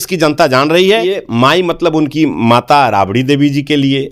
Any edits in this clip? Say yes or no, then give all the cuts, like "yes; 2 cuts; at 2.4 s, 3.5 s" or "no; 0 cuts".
yes; 1 cut; at 1.3 s